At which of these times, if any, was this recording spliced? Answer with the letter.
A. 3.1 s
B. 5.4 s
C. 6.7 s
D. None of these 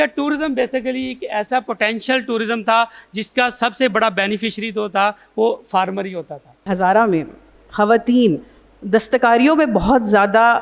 C